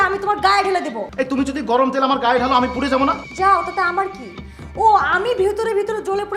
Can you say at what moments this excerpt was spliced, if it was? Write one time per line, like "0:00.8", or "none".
0:01.0

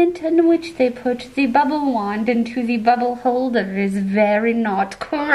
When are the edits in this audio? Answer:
none

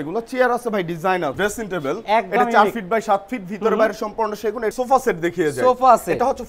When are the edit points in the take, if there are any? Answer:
0:01.3
0:04.7

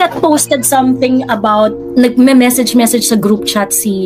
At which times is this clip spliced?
0:01.8

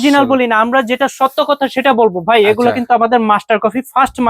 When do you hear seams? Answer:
none

